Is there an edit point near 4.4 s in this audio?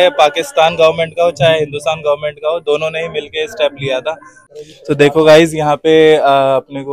yes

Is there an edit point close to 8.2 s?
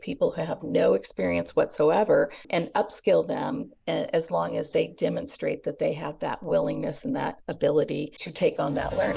yes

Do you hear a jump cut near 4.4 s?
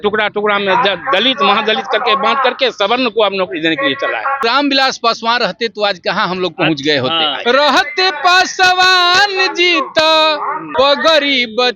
yes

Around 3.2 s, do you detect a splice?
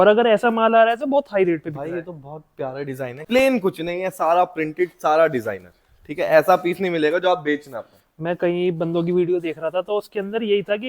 yes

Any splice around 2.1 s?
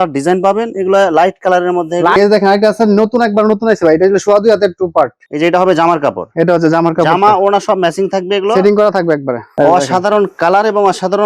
yes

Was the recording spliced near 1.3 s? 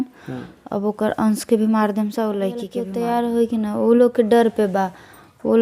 no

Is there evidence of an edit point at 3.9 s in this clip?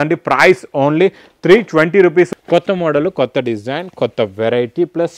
no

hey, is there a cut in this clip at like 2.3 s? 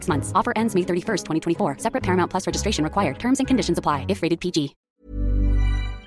no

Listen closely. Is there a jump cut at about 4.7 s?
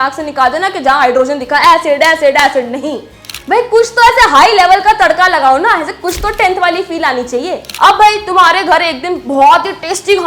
no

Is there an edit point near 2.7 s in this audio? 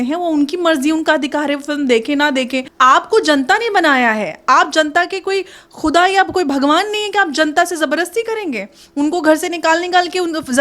yes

